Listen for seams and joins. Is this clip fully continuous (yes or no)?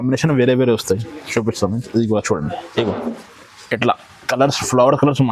yes